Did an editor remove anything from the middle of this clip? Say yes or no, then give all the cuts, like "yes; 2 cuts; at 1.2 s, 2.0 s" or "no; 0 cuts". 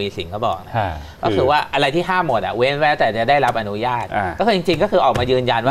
no; 0 cuts